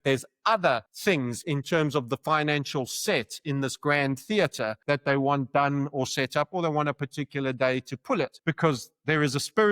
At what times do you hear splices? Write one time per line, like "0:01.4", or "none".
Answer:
0:00.9
0:04.8
0:08.4